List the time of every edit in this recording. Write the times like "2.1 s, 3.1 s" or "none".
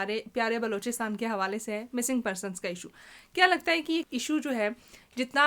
4.1 s

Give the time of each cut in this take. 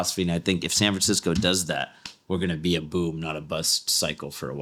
none

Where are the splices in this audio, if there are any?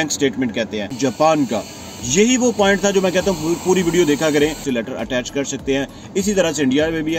0.9 s, 4.6 s

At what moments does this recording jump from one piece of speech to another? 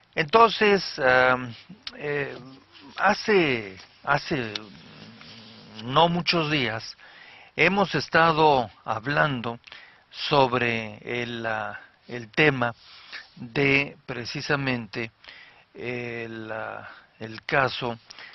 9.6 s

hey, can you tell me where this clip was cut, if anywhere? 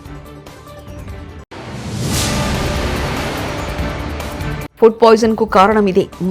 0.9 s

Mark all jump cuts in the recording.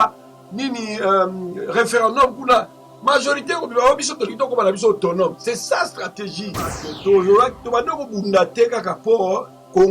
6.9 s

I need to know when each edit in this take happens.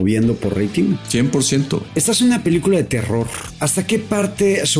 1.0 s, 1.9 s, 3.7 s

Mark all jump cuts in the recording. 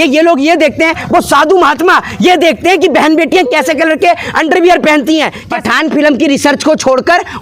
5.4 s

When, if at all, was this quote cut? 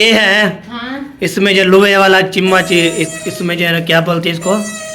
none

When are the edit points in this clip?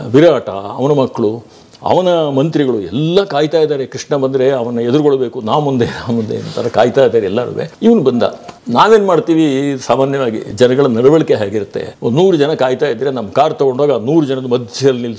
none

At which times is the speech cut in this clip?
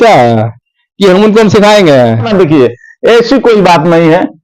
2.3 s

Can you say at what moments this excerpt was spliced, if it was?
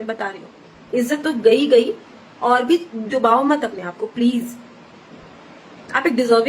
0.9 s

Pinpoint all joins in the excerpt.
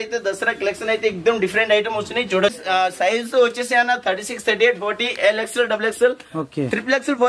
2.6 s

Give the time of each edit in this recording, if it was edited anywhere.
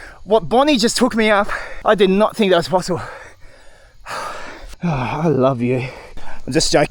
1.6 s, 4.6 s

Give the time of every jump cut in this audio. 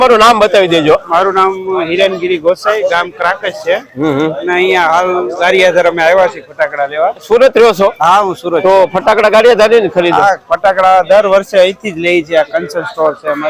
none

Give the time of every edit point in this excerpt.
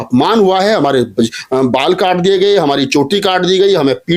none

